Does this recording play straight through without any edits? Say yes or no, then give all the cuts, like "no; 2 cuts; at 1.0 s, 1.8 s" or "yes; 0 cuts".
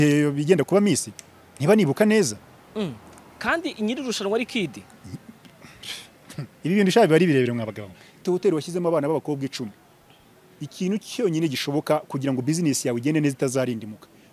no; 1 cut; at 8.1 s